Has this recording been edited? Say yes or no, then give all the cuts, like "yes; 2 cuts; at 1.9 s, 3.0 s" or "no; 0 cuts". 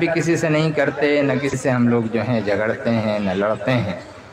yes; 1 cut; at 1.6 s